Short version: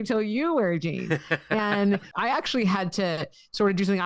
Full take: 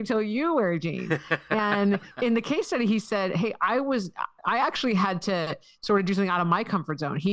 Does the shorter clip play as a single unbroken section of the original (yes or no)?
no